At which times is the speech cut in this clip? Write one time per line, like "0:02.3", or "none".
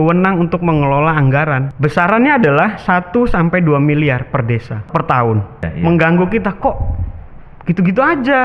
0:01.7
0:04.9
0:05.7